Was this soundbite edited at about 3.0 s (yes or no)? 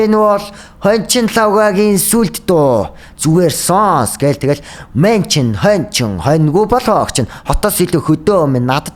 no